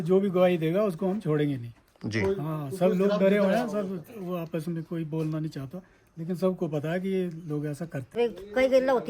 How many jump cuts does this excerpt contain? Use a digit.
1